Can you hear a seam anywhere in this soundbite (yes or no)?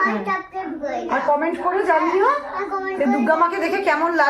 no